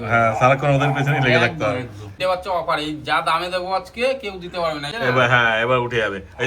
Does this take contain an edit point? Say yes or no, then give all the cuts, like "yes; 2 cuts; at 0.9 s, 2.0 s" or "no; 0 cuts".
yes; 2 cuts; at 2.1 s, 4.9 s